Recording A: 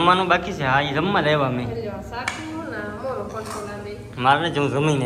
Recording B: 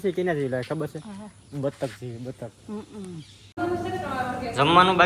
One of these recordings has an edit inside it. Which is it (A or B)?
B